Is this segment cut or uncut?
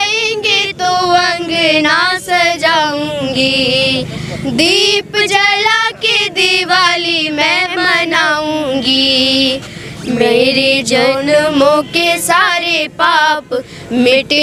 uncut